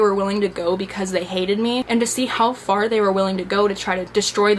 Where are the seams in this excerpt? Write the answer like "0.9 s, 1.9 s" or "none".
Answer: 1.9 s

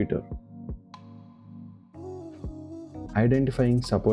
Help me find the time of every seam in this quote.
3.1 s

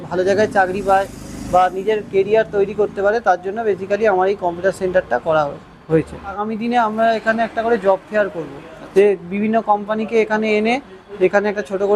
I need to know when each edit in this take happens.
6.5 s

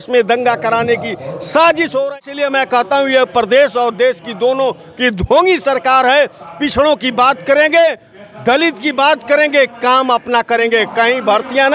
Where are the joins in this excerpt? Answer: 2.1 s

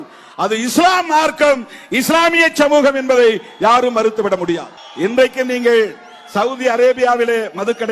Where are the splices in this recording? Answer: none

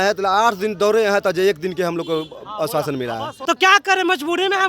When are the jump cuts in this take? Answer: 3.3 s

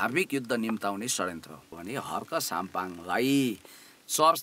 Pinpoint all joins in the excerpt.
1.7 s

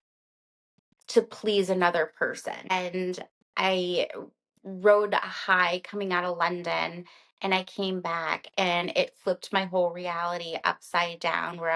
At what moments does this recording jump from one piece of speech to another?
2.7 s

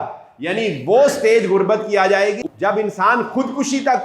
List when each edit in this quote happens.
2.4 s

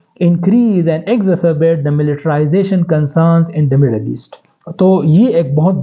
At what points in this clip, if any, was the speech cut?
none

